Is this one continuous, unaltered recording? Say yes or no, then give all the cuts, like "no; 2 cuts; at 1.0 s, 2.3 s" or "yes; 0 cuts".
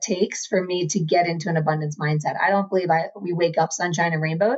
yes; 0 cuts